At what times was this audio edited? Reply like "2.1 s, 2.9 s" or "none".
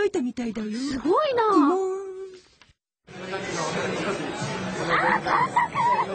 none

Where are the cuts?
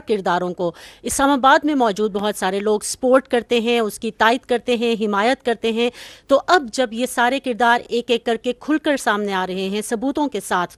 none

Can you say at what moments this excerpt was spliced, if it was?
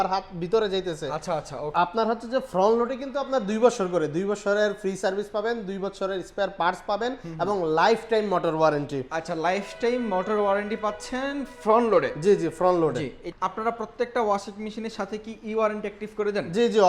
1.7 s, 13.2 s

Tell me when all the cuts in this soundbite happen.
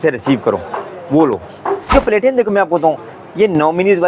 1.9 s

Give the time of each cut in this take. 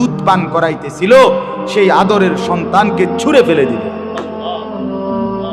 3.8 s

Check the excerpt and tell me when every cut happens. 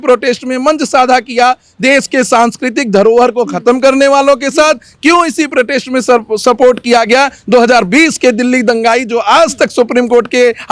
none

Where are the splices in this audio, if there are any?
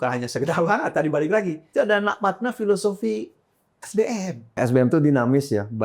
1.6 s, 4.6 s

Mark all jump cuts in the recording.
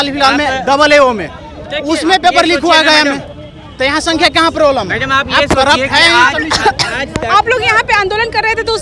none

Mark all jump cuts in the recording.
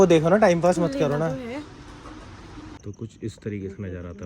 2.7 s

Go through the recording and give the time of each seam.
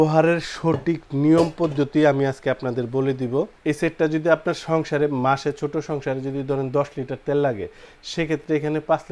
3.5 s

